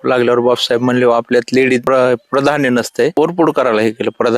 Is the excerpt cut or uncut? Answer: cut